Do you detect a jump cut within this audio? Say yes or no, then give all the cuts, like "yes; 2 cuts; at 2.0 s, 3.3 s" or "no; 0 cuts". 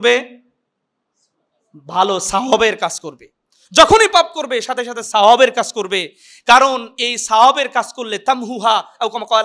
no; 0 cuts